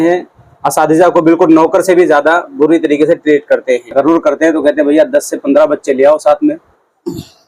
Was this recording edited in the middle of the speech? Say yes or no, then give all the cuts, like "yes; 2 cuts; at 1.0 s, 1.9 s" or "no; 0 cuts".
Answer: yes; 1 cut; at 3.9 s